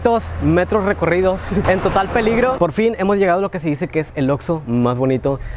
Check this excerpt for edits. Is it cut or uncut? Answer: uncut